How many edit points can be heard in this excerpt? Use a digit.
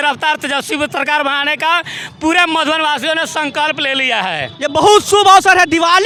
0